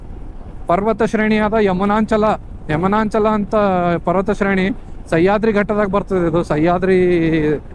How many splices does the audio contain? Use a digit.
0